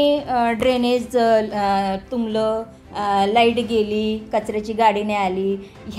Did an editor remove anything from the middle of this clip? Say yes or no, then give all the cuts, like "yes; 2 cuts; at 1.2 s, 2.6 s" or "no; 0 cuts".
no; 0 cuts